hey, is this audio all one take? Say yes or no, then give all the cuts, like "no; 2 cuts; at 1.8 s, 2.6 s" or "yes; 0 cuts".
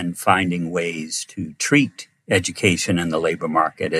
yes; 0 cuts